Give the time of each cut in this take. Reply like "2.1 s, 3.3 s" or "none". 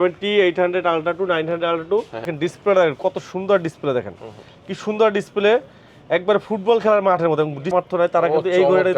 2.3 s, 7.7 s

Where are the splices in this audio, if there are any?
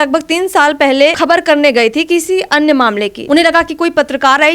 1.2 s, 3.1 s

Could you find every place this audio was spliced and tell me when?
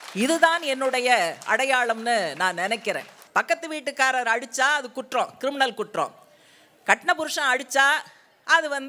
3.1 s

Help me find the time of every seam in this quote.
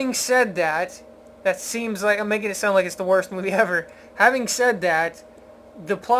2.6 s

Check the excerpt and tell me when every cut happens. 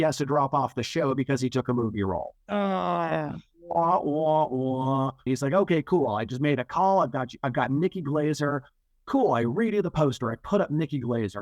5.3 s

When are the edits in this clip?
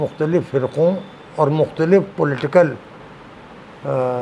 none

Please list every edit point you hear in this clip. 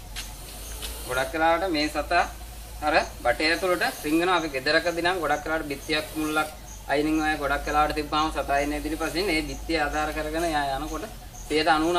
none

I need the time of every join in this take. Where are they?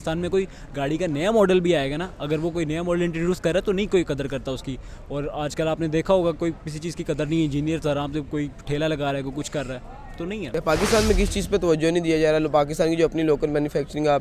none

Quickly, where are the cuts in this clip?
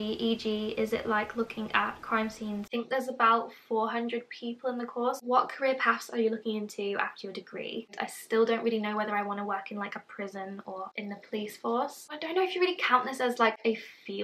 2.7 s, 5.2 s, 7.9 s, 10.9 s, 12.0 s

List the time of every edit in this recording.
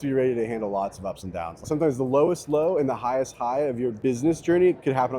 1.6 s, 4.0 s

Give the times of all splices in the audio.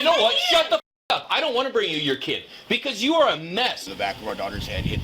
3.8 s

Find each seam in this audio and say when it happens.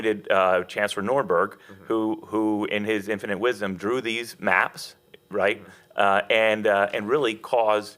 none

